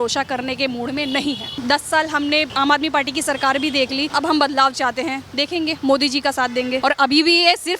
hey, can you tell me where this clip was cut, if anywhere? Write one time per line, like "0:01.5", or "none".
0:01.6
0:02.5
0:04.1
0:06.8